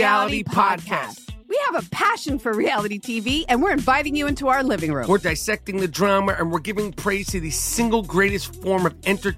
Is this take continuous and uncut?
no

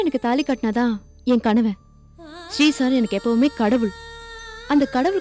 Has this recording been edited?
no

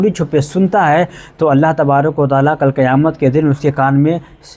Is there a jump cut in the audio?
no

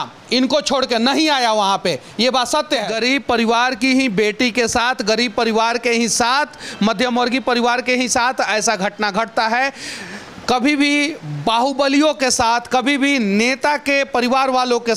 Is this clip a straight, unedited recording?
no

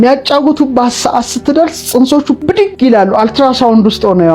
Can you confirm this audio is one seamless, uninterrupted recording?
no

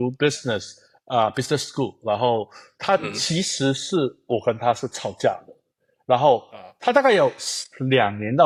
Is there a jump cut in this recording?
no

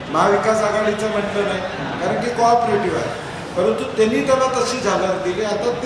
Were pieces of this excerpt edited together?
no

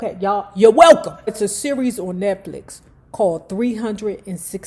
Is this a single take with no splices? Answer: no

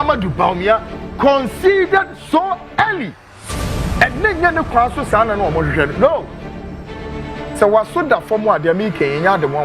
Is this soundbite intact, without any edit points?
yes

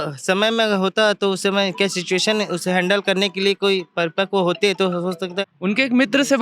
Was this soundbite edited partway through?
yes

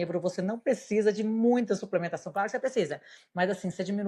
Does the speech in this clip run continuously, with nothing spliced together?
yes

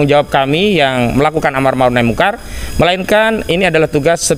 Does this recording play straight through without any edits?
yes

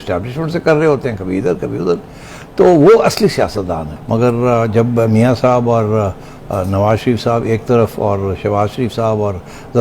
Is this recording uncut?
no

